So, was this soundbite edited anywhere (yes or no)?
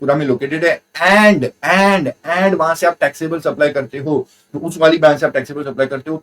yes